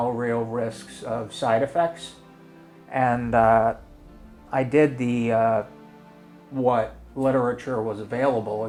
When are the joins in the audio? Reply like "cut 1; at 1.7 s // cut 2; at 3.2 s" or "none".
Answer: none